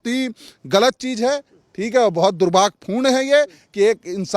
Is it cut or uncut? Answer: uncut